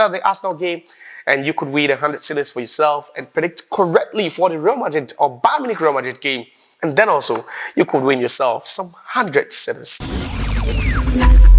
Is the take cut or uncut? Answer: cut